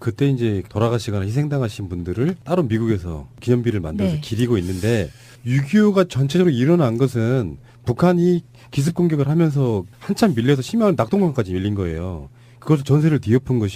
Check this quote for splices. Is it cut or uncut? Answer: uncut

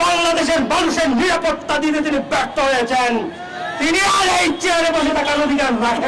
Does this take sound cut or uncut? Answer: uncut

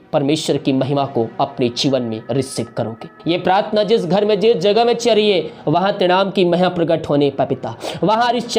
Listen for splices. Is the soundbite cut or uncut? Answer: cut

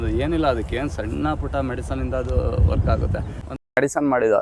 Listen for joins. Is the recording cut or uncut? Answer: cut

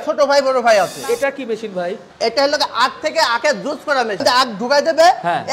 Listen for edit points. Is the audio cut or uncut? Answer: cut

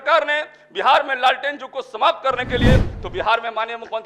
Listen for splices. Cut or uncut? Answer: cut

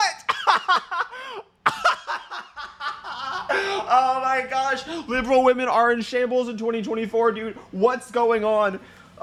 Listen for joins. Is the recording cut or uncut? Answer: uncut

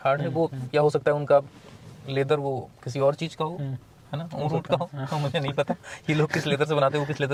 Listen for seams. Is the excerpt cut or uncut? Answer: uncut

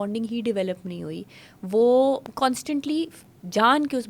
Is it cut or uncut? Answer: cut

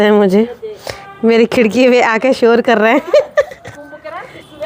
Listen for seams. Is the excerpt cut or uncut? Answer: uncut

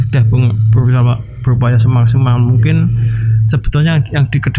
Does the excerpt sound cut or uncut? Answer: uncut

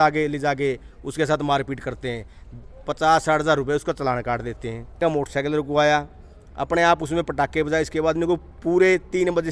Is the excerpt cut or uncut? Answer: cut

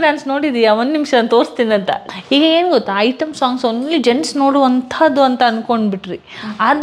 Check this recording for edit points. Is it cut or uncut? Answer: cut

